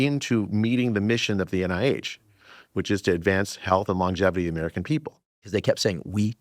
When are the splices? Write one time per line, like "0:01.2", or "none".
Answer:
0:05.4